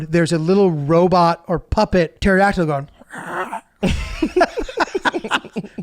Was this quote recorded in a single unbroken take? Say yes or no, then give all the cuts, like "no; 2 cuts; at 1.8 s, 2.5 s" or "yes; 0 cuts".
no; 1 cut; at 2.1 s